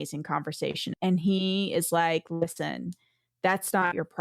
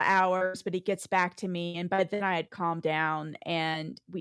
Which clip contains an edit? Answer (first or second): first